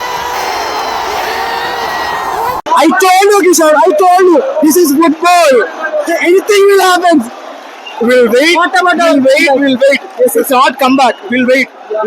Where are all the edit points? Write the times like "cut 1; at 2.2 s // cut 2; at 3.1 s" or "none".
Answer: cut 1; at 2.6 s